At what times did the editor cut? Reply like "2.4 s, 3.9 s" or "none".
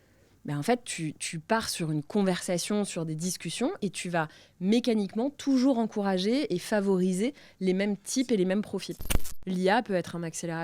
9.0 s